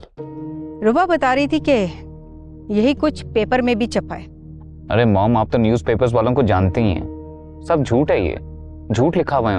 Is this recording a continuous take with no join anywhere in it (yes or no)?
yes